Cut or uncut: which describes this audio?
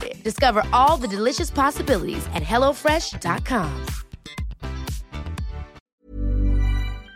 cut